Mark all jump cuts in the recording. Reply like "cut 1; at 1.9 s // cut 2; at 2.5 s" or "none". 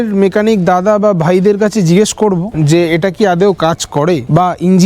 none